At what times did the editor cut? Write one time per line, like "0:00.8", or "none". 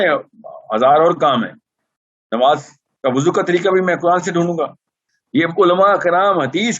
0:05.1